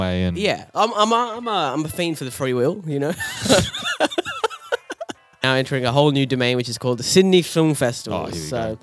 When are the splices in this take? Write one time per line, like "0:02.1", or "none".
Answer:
0:05.4